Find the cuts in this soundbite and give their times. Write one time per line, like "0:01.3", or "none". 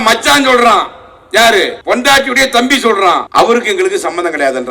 0:01.8
0:03.3